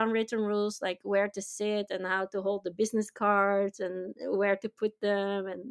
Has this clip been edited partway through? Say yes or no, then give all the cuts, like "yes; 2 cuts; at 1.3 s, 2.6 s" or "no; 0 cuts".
no; 0 cuts